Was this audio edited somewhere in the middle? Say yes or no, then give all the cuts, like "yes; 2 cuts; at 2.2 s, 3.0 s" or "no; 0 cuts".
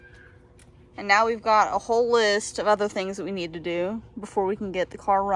no; 0 cuts